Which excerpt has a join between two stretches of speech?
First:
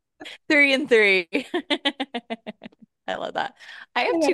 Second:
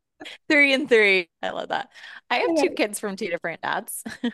second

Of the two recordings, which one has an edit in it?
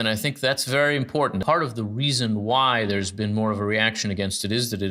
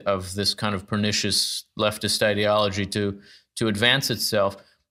first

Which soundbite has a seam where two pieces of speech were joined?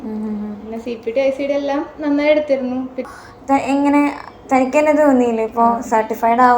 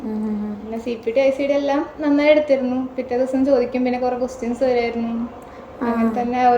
first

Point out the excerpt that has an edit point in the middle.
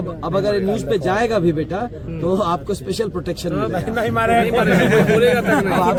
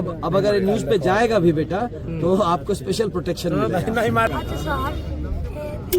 second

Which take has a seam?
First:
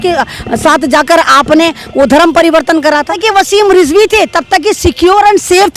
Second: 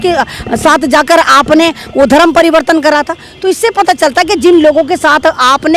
first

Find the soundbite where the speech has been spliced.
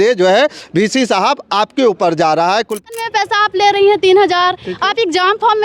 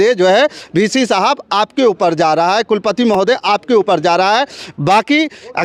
first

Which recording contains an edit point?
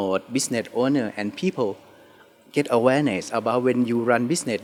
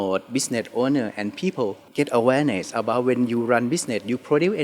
second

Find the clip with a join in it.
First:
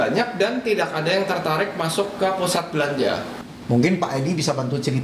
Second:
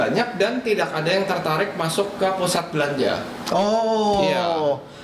first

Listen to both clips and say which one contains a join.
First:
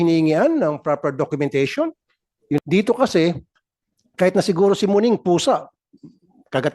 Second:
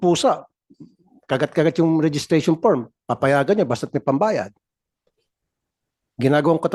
first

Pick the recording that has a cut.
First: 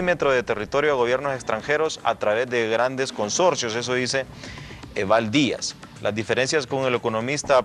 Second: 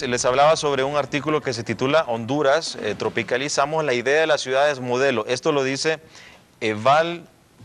first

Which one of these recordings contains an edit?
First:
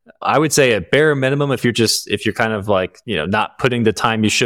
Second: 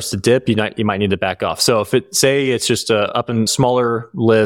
first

